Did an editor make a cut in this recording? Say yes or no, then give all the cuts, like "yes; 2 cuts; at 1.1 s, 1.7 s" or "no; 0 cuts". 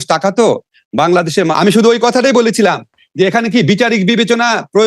yes; 1 cut; at 1.5 s